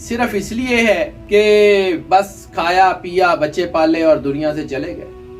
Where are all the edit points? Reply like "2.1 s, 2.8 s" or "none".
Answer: 1.2 s, 2.0 s